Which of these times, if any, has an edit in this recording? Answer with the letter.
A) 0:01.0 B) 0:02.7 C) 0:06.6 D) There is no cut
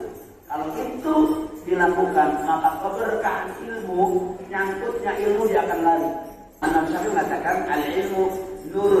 C